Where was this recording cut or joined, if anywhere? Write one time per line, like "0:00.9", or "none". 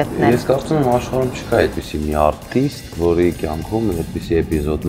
none